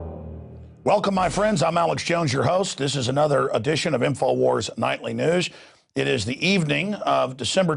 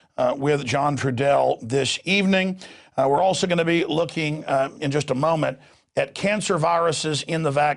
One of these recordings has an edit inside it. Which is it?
first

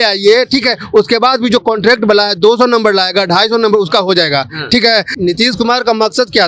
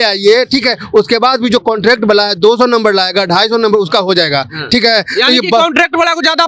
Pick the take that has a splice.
first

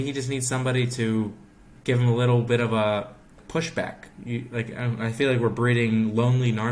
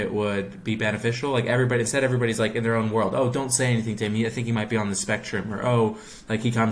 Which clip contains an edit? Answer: first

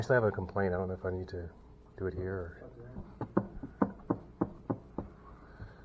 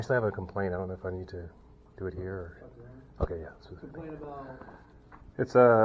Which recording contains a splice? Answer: first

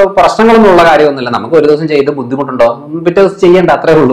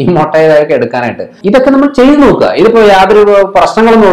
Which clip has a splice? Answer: second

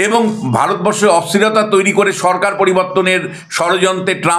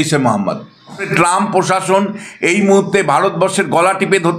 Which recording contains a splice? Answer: second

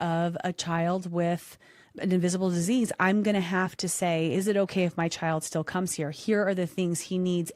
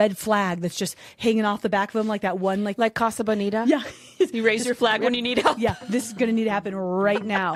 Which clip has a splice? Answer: first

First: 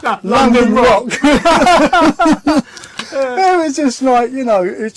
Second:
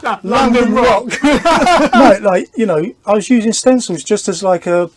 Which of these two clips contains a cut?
second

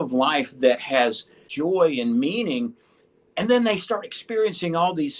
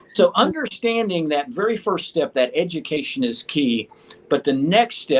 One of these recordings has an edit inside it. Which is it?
first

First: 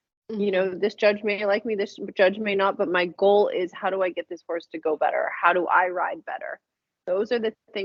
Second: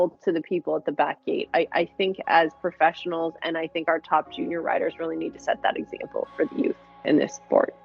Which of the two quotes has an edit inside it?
second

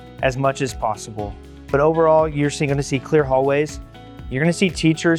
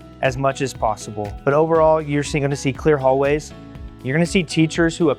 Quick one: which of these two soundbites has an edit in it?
second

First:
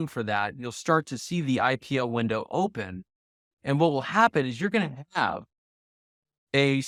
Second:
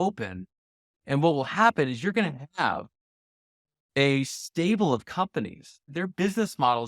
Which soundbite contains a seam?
second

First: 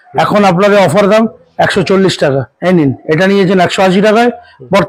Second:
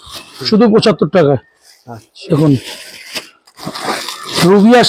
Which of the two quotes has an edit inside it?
first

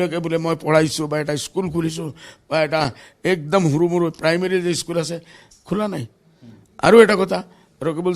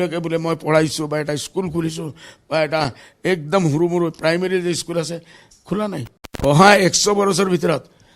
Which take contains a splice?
second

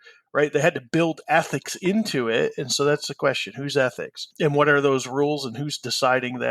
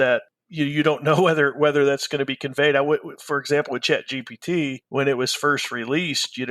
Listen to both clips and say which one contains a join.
second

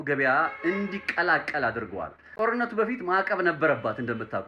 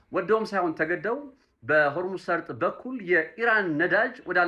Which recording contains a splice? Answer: first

